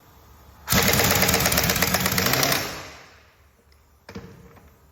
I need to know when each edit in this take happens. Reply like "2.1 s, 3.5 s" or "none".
none